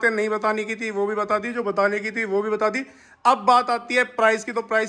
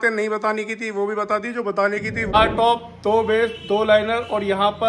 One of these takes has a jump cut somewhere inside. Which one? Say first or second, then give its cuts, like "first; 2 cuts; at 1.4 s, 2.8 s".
second; 1 cut; at 2.3 s